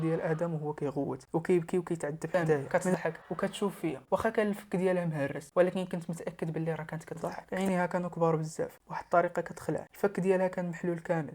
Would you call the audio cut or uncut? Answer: cut